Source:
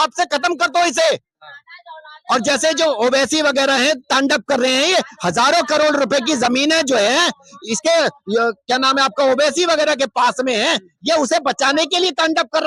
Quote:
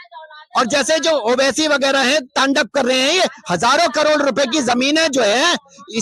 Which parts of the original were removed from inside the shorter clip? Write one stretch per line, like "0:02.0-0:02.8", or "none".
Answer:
none

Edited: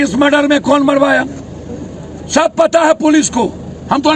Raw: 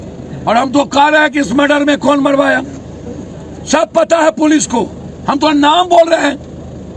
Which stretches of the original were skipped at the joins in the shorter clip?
none

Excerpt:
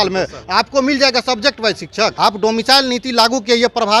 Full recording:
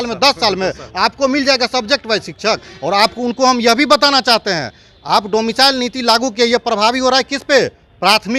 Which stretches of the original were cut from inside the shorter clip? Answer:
0:02.6-0:05.0

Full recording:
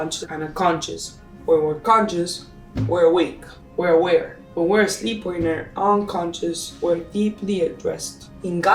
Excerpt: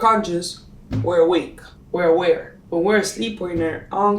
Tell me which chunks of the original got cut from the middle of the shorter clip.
none

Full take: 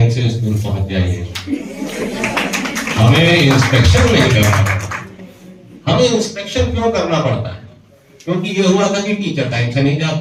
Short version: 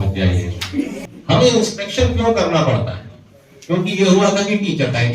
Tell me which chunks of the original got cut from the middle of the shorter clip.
0:01.7-0:05.5

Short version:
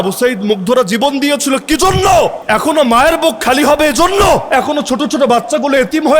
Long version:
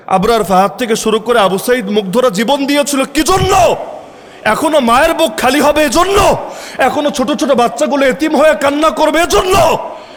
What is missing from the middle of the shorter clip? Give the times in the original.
0:03.9-0:04.4
0:06.4-0:06.7

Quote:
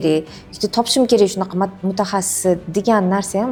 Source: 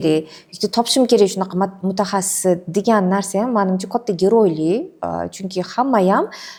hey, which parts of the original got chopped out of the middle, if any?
none

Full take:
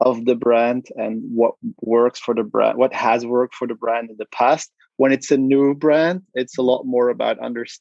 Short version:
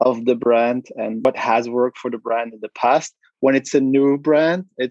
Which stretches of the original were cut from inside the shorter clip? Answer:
0:01.2-0:02.8

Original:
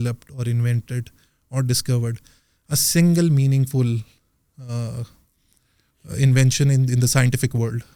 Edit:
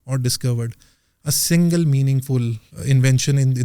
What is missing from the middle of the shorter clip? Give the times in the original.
0:04.1-0:06.0

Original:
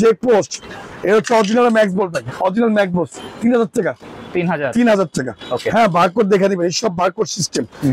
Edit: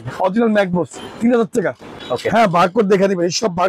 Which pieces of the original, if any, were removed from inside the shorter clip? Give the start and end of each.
0:04.1-0:05.3

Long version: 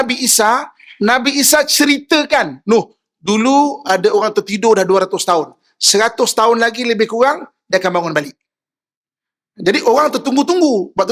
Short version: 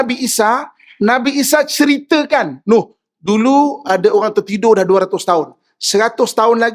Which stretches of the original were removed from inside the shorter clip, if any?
none

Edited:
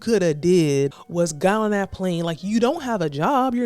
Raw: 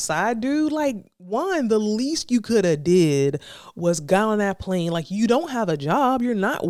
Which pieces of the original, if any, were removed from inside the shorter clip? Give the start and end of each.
0:03.4-0:03.7

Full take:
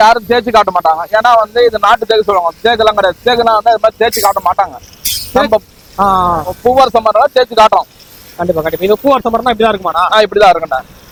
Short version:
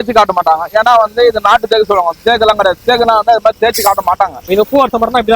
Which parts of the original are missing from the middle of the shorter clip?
0:04.8-0:08.7

